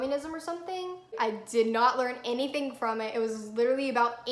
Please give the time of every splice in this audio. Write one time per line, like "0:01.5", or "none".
0:01.1

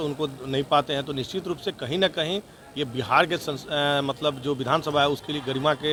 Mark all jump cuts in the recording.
none

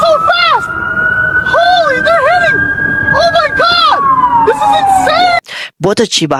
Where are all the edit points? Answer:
none

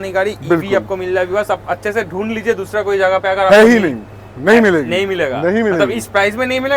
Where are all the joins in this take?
none

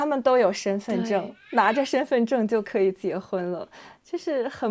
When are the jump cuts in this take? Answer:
none

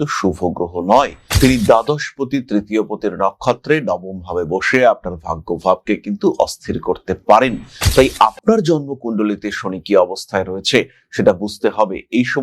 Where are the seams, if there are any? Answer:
none

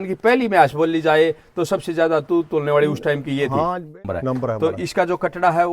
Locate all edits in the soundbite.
0:04.0

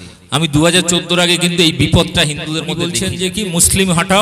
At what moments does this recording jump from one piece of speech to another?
0:02.8

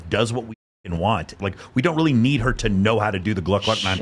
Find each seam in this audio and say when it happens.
0:01.3

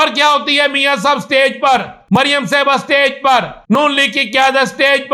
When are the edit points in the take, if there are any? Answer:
0:02.2
0:03.8

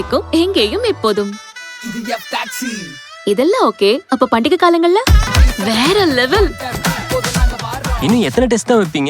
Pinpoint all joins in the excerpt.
0:05.3

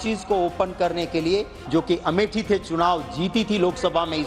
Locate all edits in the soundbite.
0:01.6

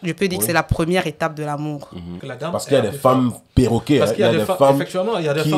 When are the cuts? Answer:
0:02.2

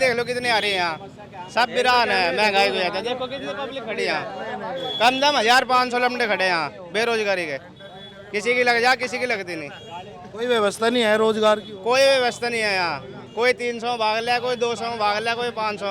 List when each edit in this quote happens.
none

